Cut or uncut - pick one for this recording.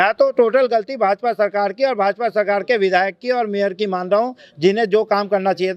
uncut